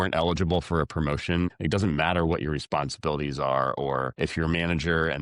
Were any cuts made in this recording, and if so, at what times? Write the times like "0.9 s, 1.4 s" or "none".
1.5 s, 4.1 s